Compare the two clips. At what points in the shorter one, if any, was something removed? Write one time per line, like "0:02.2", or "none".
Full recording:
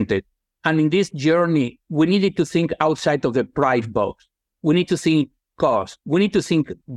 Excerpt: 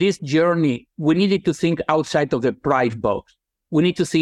none